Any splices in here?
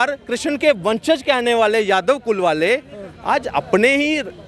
no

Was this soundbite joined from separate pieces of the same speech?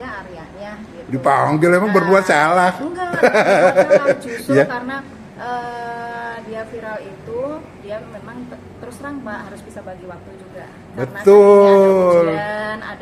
no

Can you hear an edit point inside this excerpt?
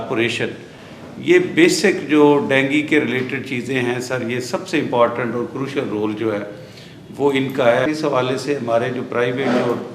yes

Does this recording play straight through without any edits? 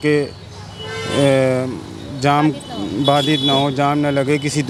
yes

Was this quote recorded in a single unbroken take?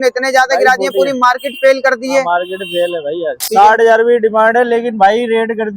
no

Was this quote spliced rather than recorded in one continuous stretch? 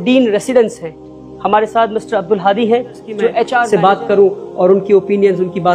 yes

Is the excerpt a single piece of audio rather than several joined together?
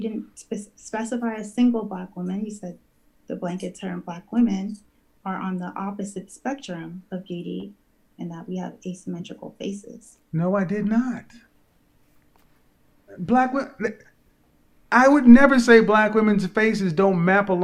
yes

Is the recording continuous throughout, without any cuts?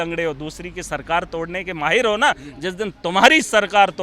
yes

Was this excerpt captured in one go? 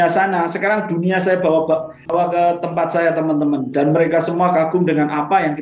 no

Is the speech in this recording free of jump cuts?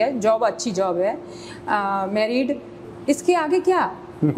no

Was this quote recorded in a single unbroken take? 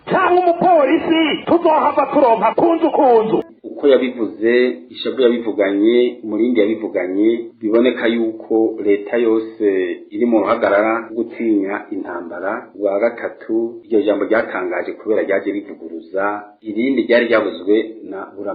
no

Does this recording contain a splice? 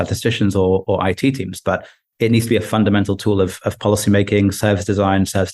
no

